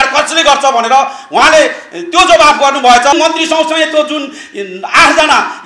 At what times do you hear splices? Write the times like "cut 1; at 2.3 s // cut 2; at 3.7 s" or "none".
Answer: cut 1; at 3.1 s